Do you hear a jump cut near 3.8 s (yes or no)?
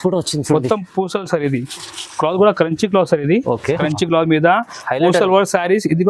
yes